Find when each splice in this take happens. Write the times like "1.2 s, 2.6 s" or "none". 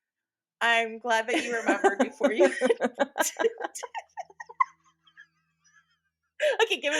none